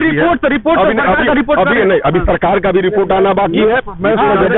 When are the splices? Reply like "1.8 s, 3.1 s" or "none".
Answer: none